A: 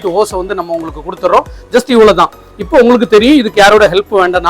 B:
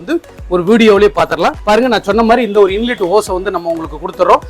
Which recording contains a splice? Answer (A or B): B